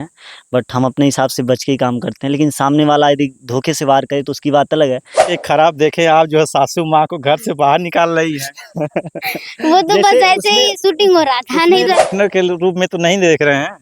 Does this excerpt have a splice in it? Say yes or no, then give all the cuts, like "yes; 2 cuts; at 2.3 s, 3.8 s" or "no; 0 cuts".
yes; 2 cuts; at 5.3 s, 12.0 s